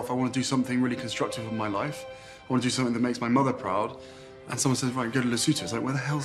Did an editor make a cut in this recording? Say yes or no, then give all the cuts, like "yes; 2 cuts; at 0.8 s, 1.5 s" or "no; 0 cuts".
yes; 1 cut; at 4.5 s